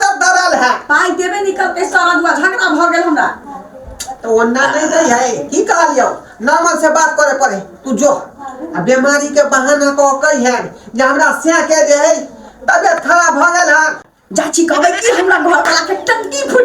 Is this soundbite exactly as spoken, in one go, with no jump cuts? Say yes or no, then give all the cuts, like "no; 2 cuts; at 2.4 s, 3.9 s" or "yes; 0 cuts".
no; 1 cut; at 14.0 s